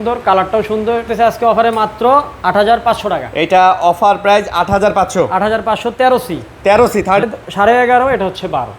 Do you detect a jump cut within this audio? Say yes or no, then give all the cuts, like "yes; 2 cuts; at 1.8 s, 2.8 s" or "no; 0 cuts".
yes; 2 cuts; at 1.1 s, 7.2 s